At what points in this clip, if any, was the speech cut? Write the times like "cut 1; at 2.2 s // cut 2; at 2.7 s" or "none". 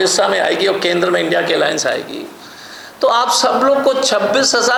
none